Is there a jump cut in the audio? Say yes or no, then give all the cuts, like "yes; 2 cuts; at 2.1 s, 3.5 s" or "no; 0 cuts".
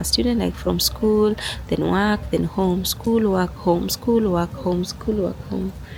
no; 0 cuts